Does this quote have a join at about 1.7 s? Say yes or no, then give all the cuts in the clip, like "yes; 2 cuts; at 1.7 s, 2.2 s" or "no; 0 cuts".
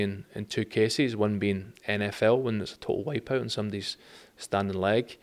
no; 0 cuts